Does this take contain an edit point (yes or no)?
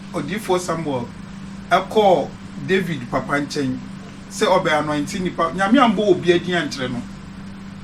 no